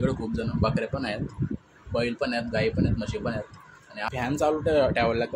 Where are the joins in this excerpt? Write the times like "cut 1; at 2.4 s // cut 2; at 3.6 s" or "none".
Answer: cut 1; at 4.1 s